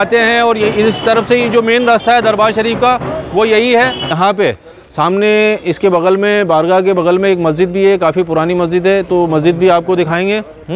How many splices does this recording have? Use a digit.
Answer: 1